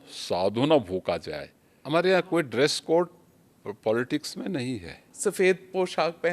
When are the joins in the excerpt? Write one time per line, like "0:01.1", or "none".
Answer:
0:01.8
0:05.1